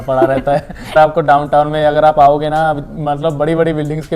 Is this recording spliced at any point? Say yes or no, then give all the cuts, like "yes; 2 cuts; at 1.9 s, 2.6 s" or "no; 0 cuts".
yes; 1 cut; at 0.9 s